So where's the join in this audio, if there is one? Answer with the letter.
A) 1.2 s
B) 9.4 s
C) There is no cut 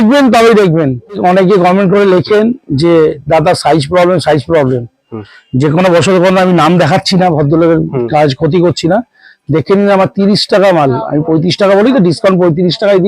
A